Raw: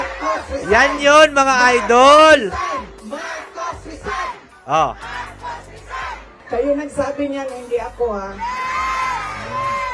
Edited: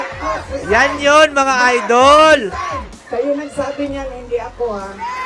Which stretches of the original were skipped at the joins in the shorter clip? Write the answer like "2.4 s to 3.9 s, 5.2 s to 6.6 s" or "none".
2.9 s to 6.3 s

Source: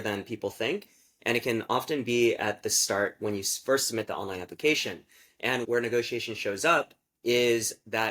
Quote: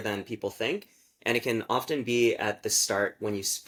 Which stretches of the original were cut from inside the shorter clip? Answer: none

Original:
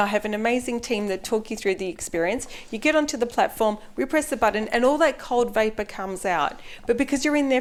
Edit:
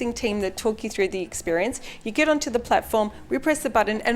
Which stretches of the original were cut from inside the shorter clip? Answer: none

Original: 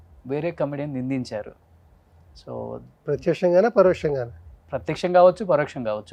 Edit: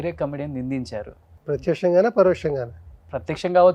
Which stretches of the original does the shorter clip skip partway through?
1.7 s to 2.9 s

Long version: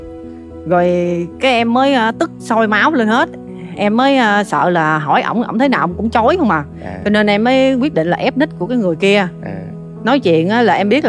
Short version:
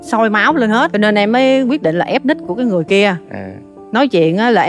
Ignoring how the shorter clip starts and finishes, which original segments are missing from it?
3.3 s to 7.0 s

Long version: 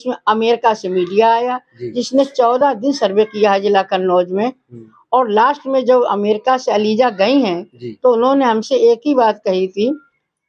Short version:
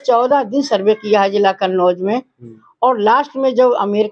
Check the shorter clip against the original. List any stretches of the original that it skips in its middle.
none

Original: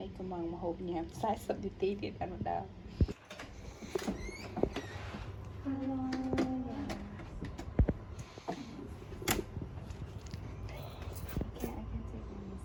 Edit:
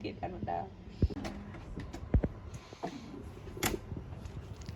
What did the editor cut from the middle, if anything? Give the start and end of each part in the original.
3.2 s to 6.8 s

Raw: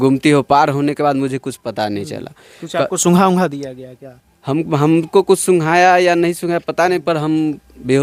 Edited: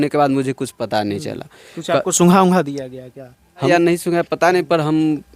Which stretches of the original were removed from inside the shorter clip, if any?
4.5 s to 6.1 s

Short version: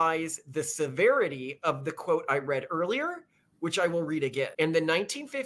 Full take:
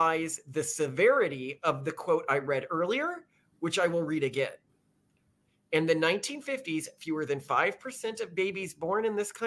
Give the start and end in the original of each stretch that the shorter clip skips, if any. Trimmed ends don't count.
4.5 s to 5.7 s

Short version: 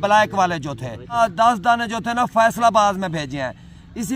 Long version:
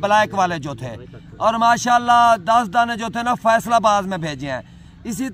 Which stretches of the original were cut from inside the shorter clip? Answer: 1.2 s to 2.3 s

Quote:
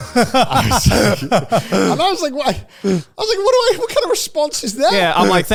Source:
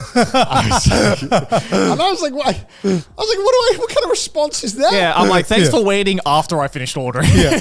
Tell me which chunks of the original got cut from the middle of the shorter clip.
none

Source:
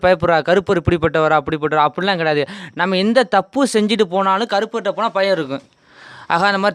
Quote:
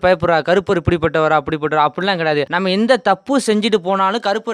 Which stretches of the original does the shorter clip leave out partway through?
2.5 s to 2.8 s

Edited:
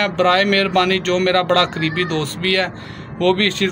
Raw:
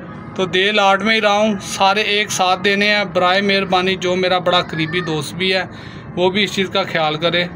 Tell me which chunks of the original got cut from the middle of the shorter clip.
none

